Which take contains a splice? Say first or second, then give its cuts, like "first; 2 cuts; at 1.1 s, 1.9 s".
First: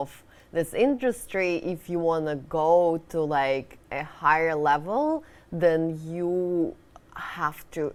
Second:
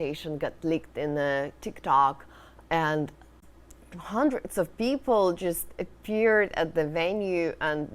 second; 1 cut; at 3.3 s